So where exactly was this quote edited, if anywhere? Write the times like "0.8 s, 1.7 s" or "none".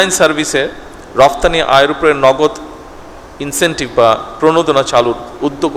none